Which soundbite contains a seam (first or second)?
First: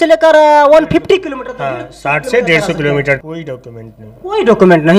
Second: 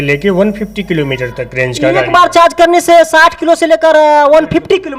first